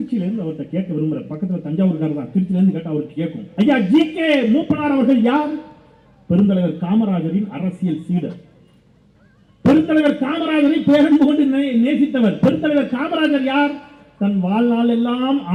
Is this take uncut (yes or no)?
yes